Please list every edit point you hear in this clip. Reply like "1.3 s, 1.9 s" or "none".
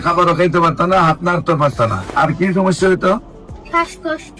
2.1 s